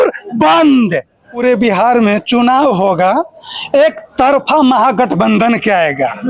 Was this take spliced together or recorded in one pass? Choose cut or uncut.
uncut